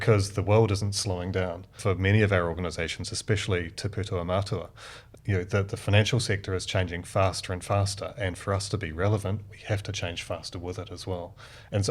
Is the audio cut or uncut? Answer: cut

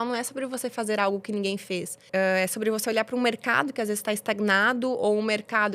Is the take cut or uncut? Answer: cut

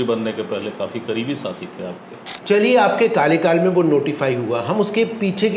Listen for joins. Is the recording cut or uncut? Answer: cut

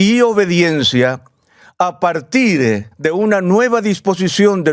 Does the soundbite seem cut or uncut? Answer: cut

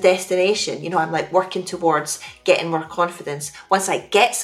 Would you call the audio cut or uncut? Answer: uncut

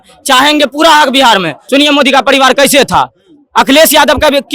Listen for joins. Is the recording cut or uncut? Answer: cut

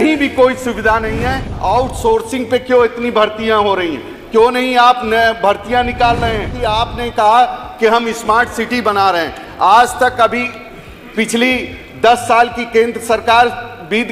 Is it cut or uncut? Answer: cut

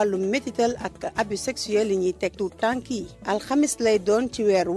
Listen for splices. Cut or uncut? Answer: uncut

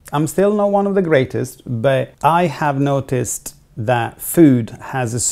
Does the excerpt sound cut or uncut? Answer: cut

